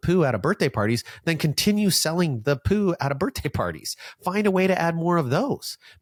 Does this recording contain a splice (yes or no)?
no